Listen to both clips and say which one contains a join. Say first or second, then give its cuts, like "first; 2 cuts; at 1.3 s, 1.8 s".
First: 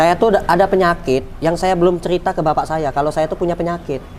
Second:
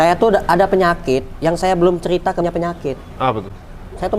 second; 1 cut; at 2.4 s